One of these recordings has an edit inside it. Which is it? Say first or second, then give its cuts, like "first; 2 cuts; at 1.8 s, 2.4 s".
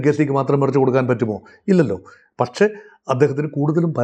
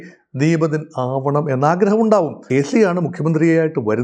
second; 1 cut; at 2.4 s